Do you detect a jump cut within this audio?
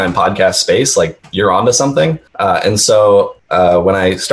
yes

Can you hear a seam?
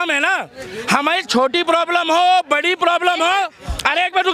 no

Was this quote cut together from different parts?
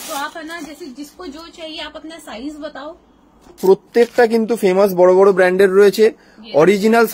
yes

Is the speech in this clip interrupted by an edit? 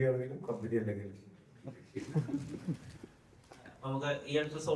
no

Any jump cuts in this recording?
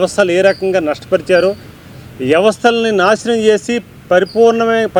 no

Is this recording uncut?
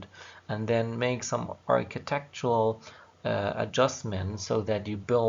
no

